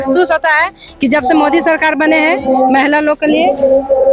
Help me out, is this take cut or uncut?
uncut